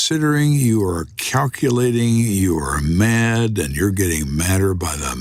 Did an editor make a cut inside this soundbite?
no; 0 cuts

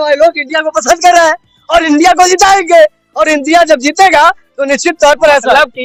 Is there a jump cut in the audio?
no; 0 cuts

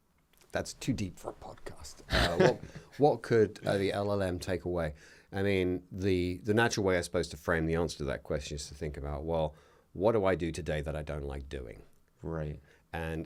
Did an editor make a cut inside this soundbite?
no; 0 cuts

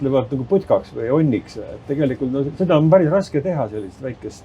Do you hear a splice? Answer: no; 0 cuts

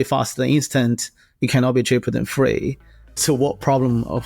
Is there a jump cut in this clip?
yes; 1 cut; at 3.2 s

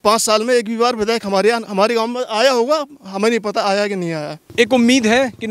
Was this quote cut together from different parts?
yes; 1 cut; at 4.5 s

